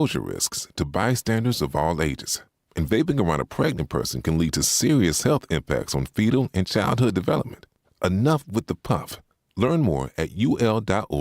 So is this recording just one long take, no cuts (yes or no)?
yes